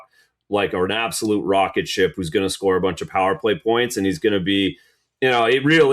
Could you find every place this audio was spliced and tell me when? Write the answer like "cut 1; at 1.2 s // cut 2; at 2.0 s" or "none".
none